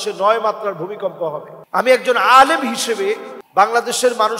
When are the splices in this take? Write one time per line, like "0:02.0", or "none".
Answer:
none